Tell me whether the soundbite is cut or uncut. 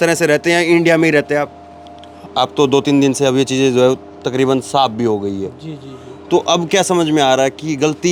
cut